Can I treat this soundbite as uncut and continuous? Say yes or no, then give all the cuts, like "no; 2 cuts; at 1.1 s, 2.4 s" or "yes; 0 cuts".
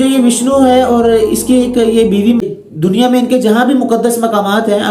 no; 1 cut; at 2.4 s